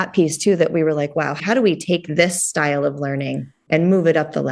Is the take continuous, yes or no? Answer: no